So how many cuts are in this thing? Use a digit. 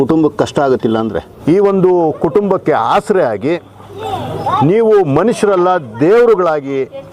1